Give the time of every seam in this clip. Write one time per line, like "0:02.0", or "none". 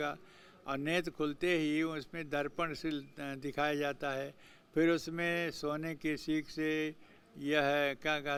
none